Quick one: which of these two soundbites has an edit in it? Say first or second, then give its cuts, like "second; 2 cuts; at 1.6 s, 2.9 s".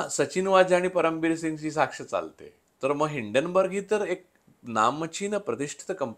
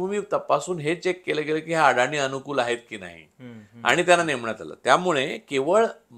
first; 1 cut; at 2.7 s